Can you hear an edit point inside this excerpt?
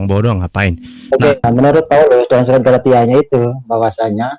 yes; 1 cut; at 1.3 s

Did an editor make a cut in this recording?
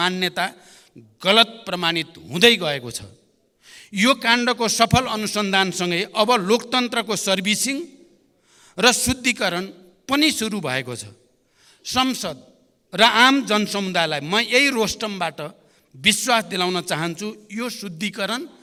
no; 0 cuts

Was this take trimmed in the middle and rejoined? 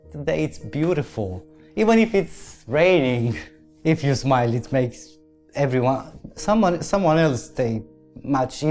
no; 0 cuts

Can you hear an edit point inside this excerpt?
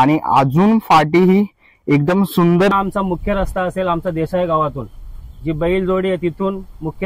yes; 1 cut; at 2.7 s

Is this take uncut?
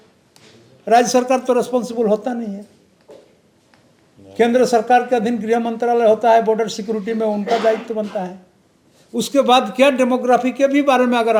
yes; 0 cuts

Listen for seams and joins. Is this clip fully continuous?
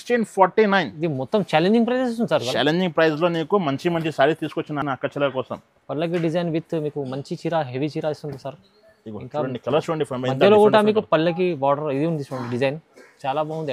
yes; 0 cuts

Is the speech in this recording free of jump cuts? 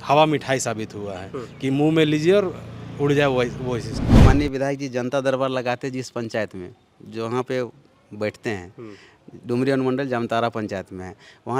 no; 1 cut; at 4.2 s

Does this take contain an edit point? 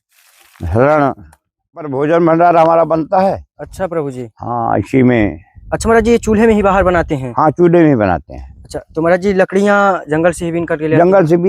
yes; 1 cut; at 1.9 s

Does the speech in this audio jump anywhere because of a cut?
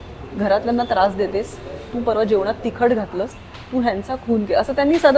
yes; 1 cut; at 3.3 s

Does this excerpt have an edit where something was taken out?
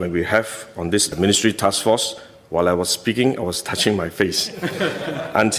no; 0 cuts

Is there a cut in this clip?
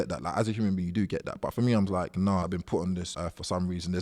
yes; 1 cut; at 3.1 s

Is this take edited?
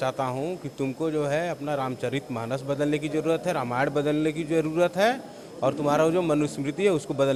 no; 0 cuts

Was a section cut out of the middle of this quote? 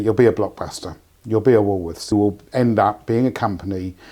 yes; 1 cut; at 2.1 s

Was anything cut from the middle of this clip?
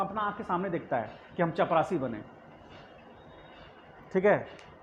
no; 0 cuts

